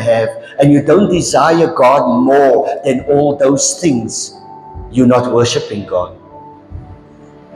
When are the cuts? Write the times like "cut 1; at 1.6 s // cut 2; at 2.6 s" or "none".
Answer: none